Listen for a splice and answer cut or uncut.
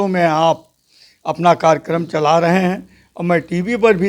uncut